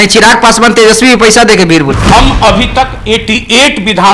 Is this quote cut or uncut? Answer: cut